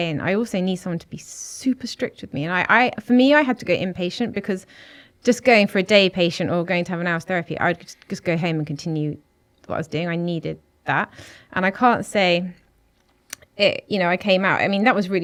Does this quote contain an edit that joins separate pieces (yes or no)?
no